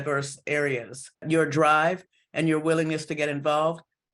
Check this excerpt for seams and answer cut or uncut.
cut